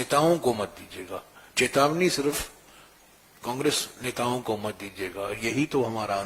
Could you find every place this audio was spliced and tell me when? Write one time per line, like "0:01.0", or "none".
none